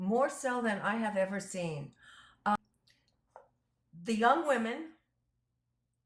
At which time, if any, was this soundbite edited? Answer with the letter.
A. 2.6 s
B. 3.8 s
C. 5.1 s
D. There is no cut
A